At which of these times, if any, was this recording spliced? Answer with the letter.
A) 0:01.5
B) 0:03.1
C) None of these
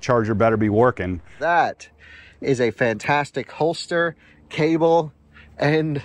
A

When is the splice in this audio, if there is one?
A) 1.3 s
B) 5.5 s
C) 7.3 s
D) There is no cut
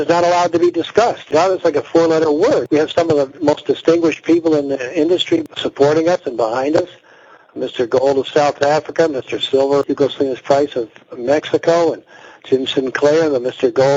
D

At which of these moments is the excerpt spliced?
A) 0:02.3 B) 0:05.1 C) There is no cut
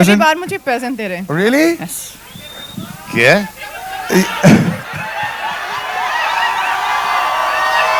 C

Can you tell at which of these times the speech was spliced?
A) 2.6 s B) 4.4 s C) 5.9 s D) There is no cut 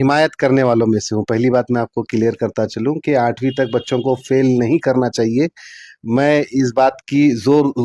D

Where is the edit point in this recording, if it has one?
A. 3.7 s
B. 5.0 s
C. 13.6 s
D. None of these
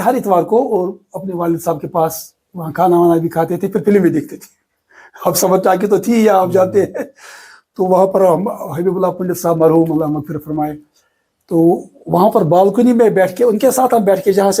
D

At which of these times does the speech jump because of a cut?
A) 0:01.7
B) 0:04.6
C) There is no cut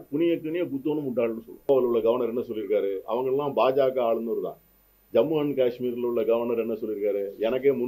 A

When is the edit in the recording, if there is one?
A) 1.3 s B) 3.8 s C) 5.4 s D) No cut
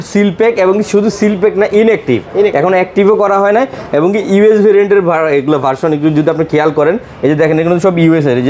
D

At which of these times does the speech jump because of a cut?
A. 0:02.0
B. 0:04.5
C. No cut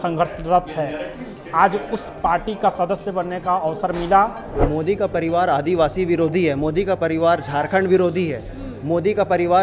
B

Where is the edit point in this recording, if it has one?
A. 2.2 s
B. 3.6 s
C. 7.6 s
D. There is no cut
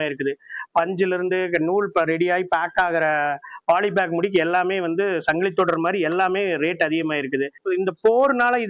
C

